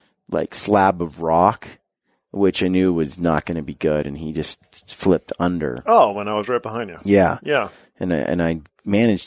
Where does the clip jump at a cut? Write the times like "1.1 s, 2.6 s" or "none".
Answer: none

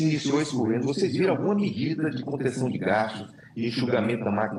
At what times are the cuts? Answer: none

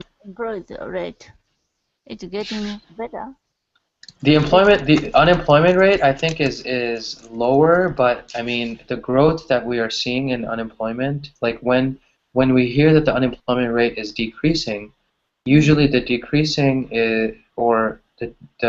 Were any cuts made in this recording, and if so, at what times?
none

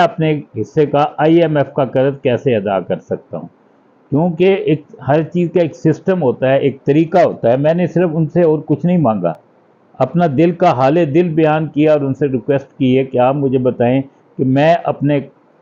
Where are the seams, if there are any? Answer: none

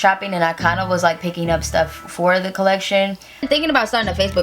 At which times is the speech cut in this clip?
3.5 s

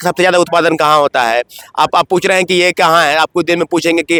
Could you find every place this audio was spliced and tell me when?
none

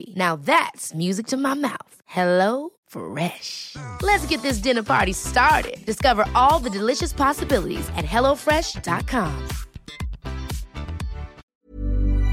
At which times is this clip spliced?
11.4 s

